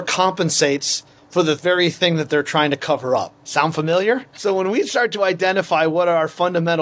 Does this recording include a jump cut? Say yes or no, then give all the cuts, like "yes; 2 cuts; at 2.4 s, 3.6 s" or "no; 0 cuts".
yes; 2 cuts; at 3.4 s, 4.3 s